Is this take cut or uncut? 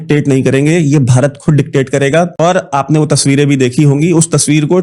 uncut